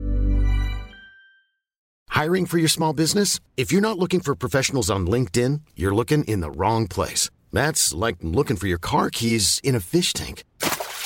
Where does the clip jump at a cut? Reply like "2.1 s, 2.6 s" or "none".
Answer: 1.9 s